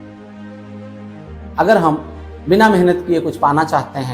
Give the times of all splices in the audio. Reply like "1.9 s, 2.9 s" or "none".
1.5 s